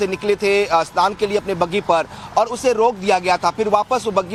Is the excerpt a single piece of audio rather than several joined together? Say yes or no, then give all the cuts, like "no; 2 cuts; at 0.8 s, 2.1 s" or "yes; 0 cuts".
yes; 0 cuts